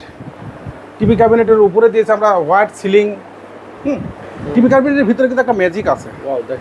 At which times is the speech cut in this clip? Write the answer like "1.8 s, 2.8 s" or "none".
none